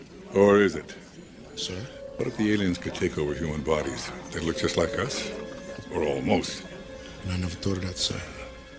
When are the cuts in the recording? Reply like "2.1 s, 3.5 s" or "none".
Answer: 7.7 s